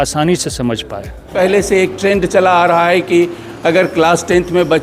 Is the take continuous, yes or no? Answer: no